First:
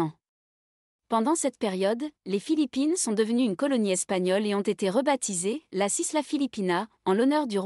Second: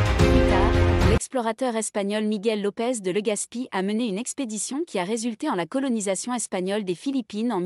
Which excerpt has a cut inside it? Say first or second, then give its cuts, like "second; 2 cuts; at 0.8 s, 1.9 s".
second; 1 cut; at 1.2 s